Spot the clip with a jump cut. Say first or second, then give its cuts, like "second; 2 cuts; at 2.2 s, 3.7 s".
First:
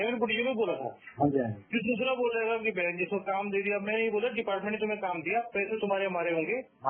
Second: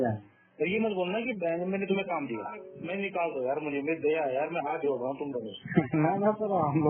second; 1 cut; at 2.8 s